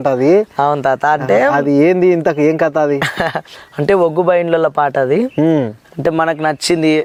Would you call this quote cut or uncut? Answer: uncut